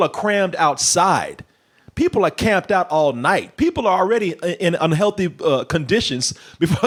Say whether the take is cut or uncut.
uncut